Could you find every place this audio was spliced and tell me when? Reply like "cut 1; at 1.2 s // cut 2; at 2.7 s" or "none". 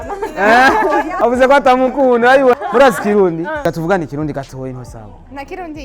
cut 1; at 1.1 s // cut 2; at 2.5 s // cut 3; at 3.6 s